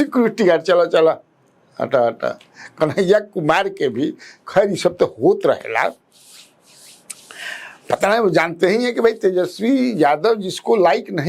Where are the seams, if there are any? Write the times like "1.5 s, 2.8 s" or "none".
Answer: none